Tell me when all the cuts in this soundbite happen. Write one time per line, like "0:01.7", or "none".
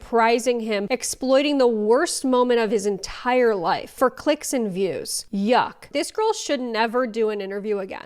0:05.8